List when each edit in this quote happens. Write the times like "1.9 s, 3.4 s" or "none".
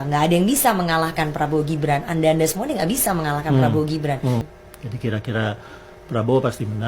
4.5 s